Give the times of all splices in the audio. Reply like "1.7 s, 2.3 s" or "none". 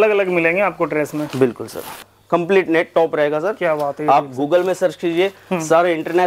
2.1 s